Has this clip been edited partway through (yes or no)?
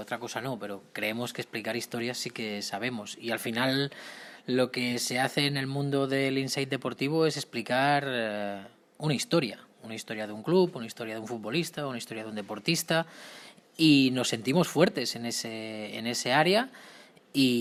no